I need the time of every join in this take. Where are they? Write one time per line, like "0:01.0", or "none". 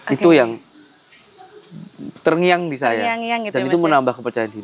none